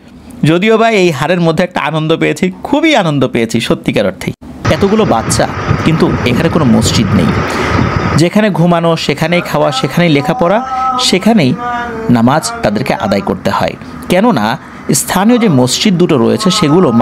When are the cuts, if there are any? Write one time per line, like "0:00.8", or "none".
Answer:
0:04.6

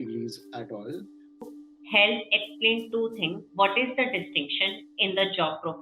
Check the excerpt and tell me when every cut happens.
0:01.4

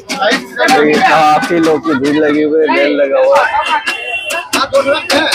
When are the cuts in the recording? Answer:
none

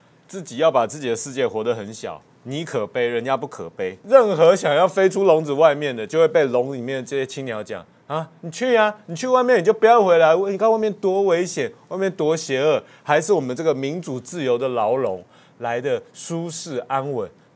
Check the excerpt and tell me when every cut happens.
0:04.0

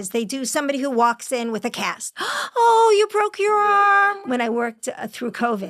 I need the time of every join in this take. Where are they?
0:04.2

